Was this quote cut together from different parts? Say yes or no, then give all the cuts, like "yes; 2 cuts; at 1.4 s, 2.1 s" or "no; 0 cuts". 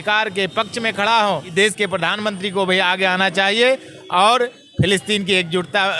yes; 1 cut; at 1.5 s